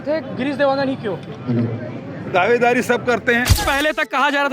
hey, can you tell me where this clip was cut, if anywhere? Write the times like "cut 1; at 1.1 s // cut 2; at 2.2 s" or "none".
cut 1; at 3.6 s